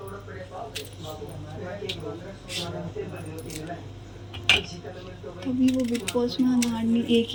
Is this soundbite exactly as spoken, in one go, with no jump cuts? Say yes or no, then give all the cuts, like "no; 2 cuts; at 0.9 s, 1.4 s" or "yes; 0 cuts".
yes; 0 cuts